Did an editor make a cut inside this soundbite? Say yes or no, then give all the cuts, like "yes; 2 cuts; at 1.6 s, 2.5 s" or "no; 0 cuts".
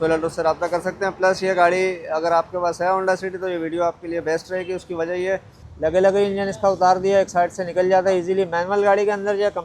yes; 1 cut; at 5.6 s